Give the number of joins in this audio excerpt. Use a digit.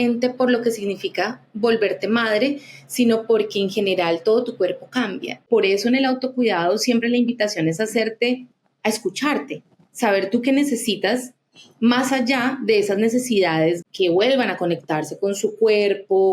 2